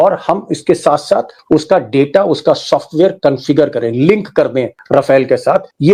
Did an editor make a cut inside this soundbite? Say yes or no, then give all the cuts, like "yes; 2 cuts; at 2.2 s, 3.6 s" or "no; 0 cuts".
no; 0 cuts